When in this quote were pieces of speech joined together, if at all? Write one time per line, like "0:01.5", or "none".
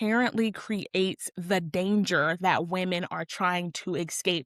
none

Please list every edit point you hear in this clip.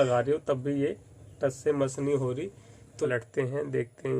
0:03.1

